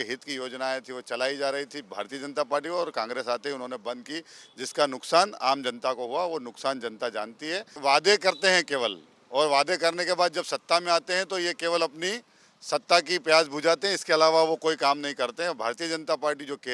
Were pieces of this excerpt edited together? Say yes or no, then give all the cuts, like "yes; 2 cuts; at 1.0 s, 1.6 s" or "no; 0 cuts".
yes; 1 cut; at 7.8 s